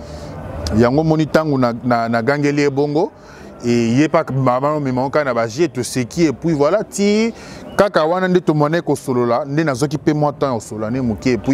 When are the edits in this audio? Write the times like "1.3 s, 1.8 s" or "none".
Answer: none